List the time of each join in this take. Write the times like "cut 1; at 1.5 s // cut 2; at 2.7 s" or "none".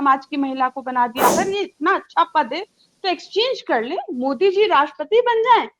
cut 1; at 1.3 s